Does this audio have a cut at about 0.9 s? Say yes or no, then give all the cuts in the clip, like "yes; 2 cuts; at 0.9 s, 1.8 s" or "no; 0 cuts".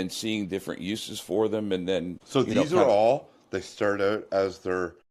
no; 1 cut; at 2.2 s